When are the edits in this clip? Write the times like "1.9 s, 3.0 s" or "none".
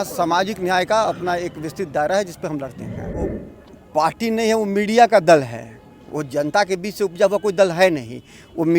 3.2 s